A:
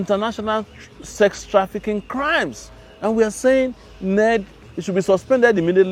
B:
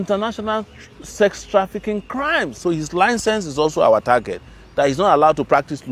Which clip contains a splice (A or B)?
B